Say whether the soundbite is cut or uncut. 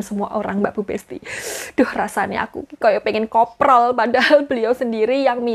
uncut